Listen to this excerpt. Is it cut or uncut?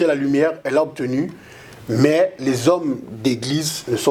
uncut